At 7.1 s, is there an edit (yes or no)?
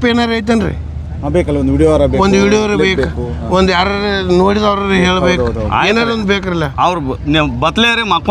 no